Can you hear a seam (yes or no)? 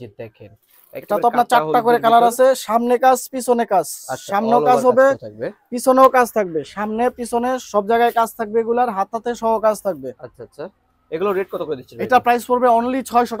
no